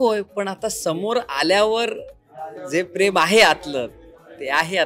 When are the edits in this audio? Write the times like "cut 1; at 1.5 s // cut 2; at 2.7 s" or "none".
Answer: none